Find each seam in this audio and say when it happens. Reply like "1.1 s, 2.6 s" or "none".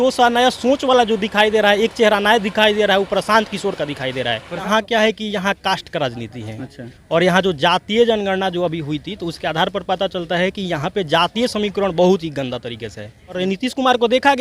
4.6 s, 13.4 s